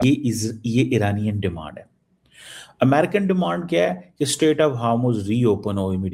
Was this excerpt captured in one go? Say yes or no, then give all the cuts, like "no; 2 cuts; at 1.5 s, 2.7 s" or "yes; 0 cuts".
yes; 0 cuts